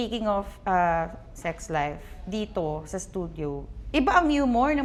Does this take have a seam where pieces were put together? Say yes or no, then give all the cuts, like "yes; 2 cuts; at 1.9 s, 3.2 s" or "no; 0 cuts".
no; 0 cuts